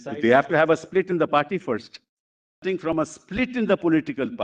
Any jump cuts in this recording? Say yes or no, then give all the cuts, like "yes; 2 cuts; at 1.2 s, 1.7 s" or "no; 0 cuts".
yes; 1 cut; at 2.6 s